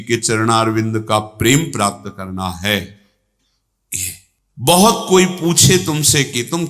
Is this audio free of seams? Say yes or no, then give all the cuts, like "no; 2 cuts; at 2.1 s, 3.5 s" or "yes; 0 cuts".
no; 1 cut; at 4.3 s